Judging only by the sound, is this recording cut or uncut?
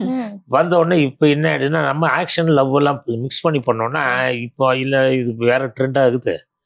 uncut